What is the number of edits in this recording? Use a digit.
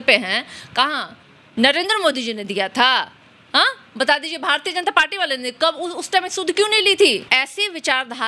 1